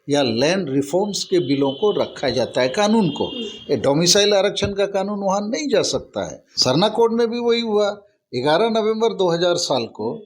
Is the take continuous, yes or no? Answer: no